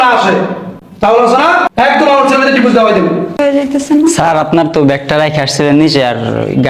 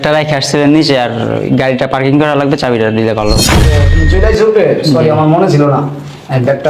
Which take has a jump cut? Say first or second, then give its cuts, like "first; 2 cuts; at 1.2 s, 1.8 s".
first; 2 cuts; at 1.7 s, 3.4 s